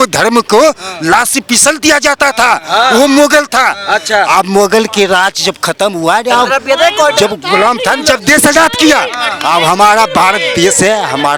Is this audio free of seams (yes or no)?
yes